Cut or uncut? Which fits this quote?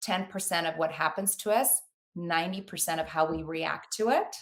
uncut